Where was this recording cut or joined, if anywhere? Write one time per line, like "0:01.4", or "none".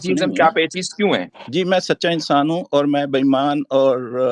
0:01.4